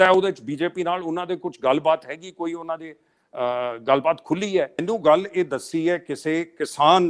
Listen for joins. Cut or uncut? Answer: cut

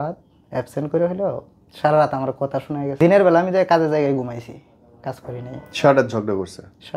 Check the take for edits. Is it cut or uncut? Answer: cut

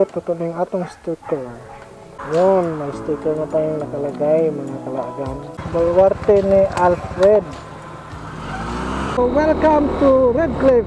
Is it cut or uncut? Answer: cut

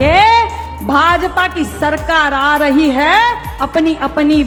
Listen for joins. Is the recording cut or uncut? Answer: uncut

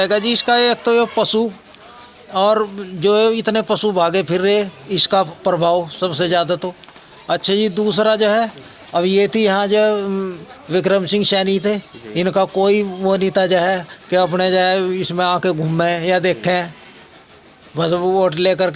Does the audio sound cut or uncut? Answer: uncut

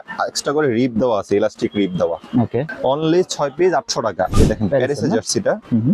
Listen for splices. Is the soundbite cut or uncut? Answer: cut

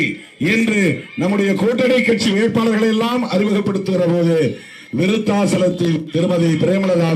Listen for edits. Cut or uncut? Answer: uncut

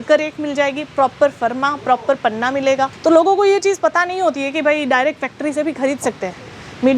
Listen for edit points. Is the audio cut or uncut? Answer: cut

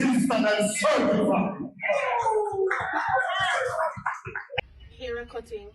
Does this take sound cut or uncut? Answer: cut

